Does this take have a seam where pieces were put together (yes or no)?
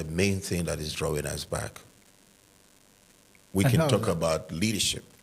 no